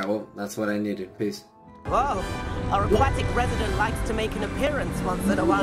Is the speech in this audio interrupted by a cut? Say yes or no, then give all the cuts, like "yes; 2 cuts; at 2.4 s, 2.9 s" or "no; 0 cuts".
yes; 1 cut; at 1.7 s